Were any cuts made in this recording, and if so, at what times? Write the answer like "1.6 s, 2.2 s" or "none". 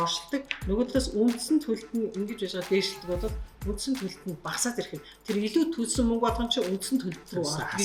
none

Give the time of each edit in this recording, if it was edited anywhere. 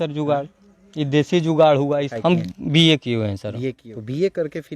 2.1 s, 3.8 s

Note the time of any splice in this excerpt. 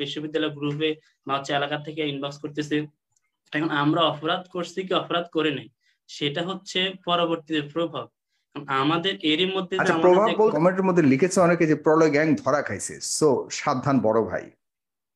10.5 s

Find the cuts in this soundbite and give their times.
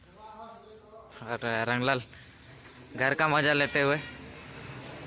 none

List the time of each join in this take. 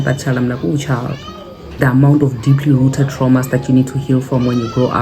1.8 s

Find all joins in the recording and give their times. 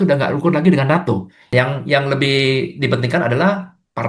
1.4 s

